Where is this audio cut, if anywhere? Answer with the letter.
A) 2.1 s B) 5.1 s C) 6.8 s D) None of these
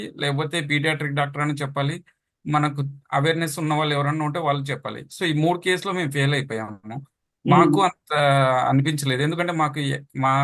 D